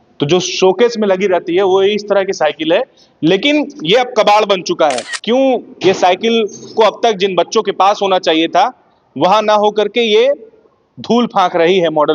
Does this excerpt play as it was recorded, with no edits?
no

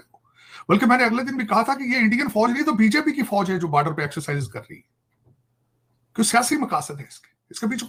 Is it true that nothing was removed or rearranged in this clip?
yes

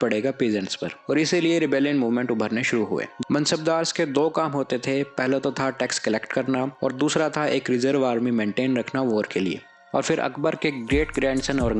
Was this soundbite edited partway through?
yes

